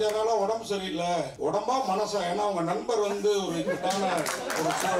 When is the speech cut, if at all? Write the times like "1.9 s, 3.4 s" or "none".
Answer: 1.3 s